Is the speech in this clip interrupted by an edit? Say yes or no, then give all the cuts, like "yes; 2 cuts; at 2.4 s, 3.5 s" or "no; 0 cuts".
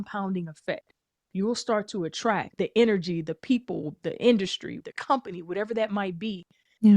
yes; 2 cuts; at 2.5 s, 4.8 s